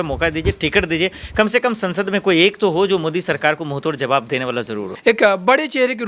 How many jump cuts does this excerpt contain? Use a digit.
1